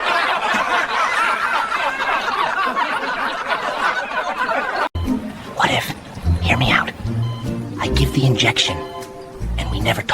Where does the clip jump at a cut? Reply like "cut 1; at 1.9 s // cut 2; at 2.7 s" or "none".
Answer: cut 1; at 5.0 s